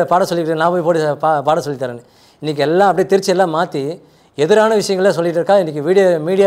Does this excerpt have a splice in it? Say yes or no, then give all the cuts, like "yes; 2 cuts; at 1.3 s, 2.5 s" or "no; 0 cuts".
no; 0 cuts